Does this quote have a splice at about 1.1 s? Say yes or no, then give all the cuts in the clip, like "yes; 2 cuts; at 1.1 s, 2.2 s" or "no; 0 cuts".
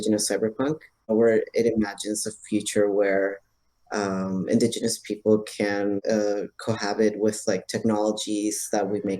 yes; 2 cuts; at 1.1 s, 6.0 s